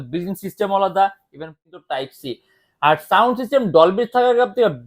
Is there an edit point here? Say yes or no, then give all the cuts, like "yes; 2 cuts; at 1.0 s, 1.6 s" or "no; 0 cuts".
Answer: yes; 1 cut; at 1.6 s